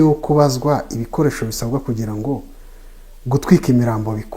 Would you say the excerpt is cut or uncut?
uncut